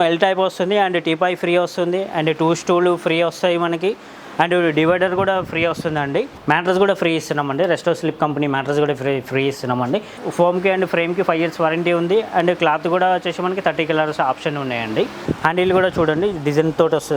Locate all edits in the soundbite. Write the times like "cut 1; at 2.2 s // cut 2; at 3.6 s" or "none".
cut 1; at 6.3 s // cut 2; at 10.2 s // cut 3; at 15.2 s